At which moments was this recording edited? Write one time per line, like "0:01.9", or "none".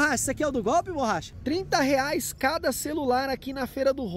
0:01.4

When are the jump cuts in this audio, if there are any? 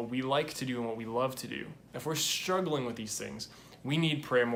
0:01.8

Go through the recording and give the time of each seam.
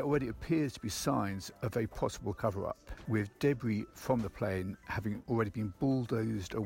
0:02.4
0:03.9

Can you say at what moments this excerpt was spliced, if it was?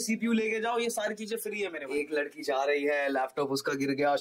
0:01.8

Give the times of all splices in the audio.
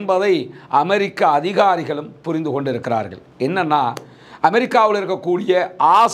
none

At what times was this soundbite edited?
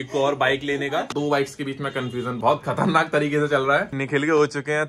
0:01.1
0:04.0

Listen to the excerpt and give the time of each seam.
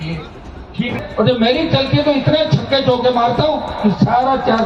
0:00.9

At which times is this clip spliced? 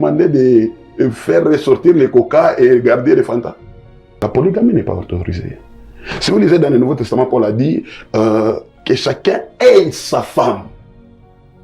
0:04.2

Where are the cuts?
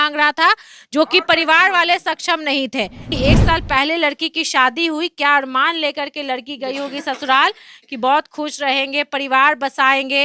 0:03.1

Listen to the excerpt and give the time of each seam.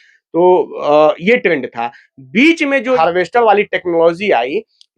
0:03.0

